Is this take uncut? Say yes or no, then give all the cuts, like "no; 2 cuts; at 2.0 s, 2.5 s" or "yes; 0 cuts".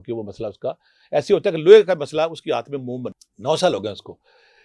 no; 1 cut; at 3.2 s